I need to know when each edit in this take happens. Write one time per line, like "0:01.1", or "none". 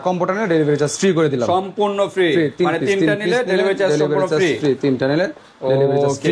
none